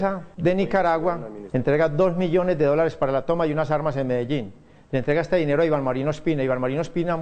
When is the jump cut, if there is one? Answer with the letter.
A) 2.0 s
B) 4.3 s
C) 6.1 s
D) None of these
A